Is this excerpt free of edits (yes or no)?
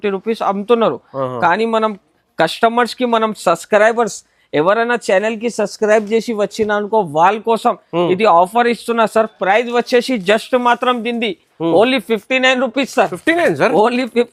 yes